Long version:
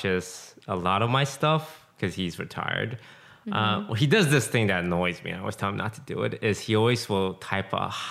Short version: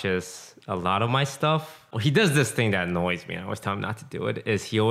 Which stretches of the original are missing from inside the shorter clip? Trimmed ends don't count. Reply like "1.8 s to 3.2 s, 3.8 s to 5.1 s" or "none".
1.9 s to 3.9 s